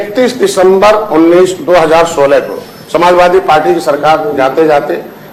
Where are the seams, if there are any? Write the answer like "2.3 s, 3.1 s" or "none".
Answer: none